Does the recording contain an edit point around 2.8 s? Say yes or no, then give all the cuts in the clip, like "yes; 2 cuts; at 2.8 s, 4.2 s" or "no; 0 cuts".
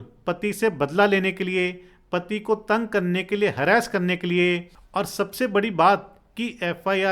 no; 1 cut; at 4.8 s